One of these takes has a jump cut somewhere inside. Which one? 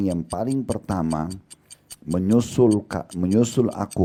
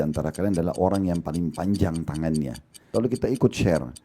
second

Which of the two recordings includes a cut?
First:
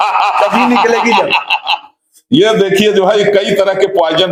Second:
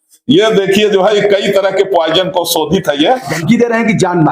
second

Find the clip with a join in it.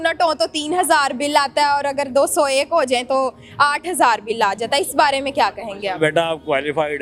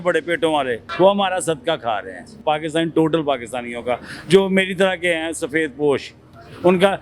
second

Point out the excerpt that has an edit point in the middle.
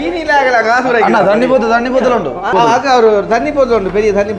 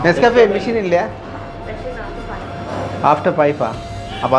first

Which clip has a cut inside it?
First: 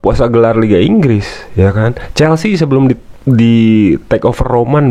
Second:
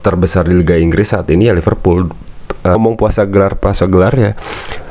second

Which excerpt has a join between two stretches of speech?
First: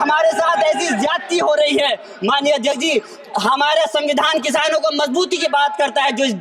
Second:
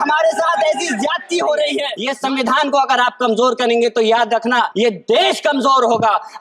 second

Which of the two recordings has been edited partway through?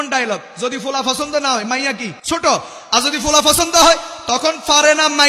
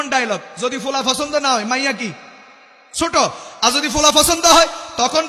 first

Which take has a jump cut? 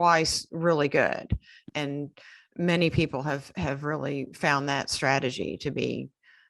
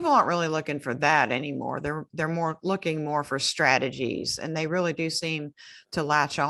first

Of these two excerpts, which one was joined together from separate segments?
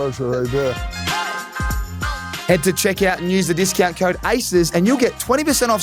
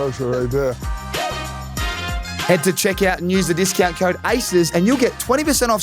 second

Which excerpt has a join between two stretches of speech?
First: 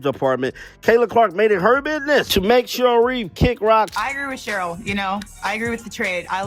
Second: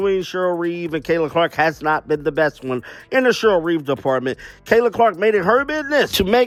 first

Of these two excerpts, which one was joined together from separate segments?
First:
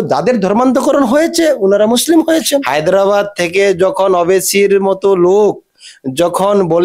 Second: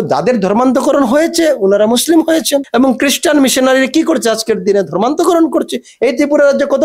first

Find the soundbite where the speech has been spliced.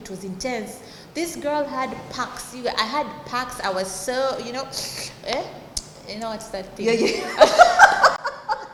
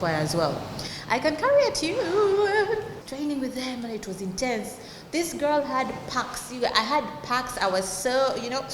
second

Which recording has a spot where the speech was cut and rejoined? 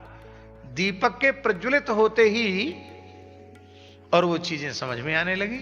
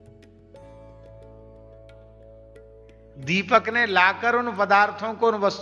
second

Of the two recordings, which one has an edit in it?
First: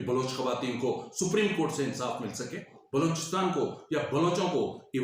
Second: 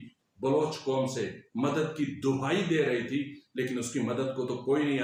first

